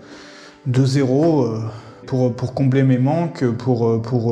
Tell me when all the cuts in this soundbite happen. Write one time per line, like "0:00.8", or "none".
0:02.0